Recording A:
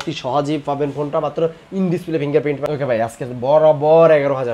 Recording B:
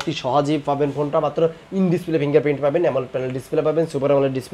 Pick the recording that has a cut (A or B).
A